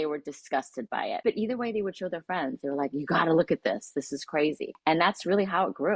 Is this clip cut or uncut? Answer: cut